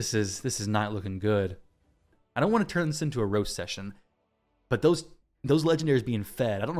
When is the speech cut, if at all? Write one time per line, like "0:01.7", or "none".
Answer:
0:02.1